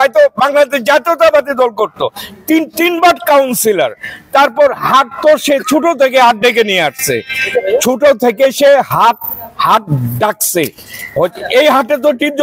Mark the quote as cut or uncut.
uncut